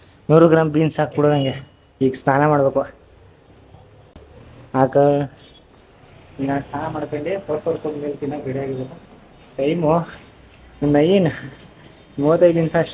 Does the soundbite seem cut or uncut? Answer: uncut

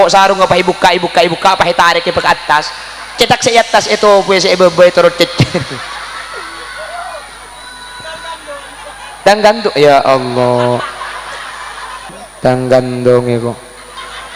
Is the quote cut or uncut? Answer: cut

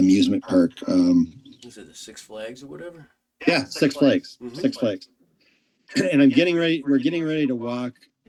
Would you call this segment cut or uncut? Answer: uncut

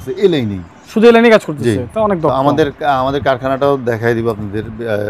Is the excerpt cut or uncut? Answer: uncut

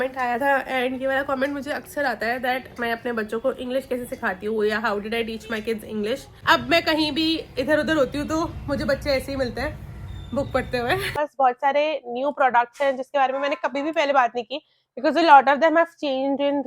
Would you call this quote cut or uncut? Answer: cut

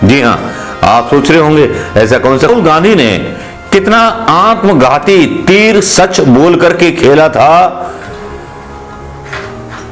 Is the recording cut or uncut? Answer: cut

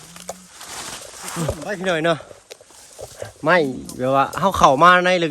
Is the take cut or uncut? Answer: cut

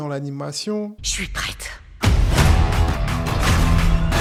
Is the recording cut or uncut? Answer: uncut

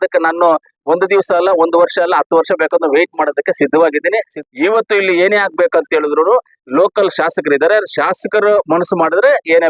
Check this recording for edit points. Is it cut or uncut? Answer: cut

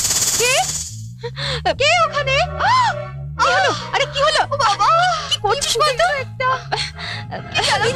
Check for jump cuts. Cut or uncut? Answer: uncut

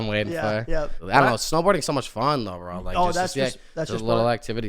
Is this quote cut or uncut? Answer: cut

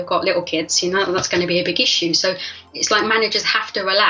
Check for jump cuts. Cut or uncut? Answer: cut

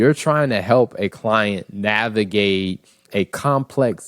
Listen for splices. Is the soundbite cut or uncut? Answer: cut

